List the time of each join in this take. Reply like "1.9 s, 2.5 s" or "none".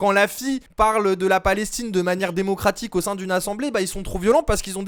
none